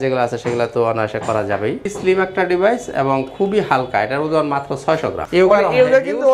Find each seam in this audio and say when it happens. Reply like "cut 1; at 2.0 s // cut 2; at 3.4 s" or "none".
cut 1; at 1.9 s // cut 2; at 5.2 s